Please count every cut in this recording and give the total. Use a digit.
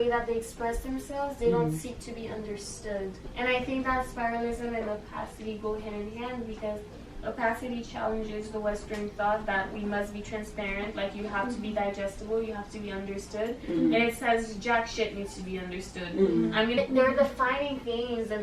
2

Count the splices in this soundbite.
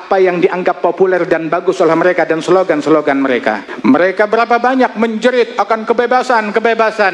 1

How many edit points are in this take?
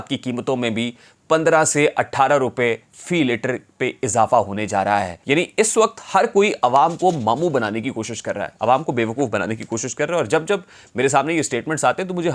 1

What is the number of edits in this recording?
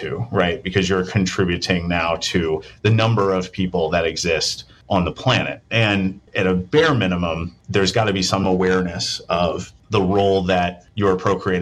2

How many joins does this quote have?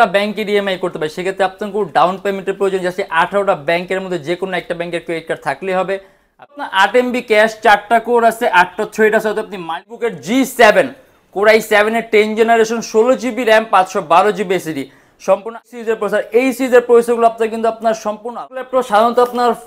4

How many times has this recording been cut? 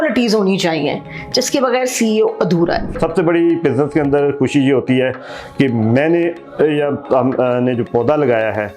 1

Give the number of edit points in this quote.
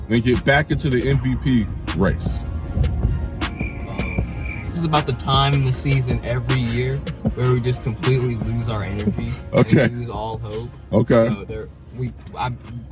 1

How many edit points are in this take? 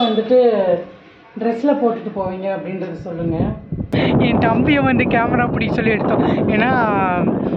1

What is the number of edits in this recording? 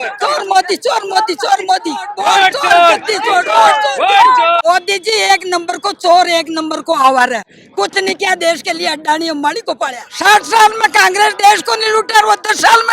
3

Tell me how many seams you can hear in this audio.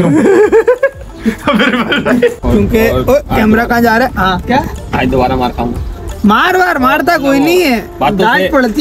1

